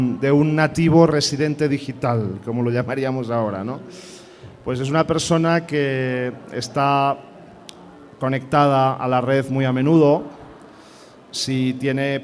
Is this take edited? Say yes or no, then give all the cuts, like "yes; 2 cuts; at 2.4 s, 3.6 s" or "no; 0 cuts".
no; 0 cuts